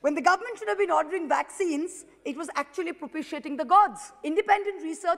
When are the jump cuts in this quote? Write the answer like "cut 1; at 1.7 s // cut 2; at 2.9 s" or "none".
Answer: cut 1; at 4.1 s